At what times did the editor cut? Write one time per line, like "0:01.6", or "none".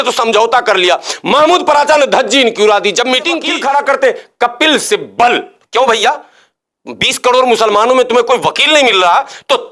0:03.5